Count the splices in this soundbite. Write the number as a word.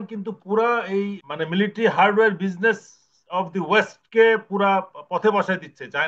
one